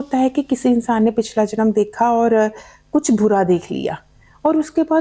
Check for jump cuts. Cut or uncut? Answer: uncut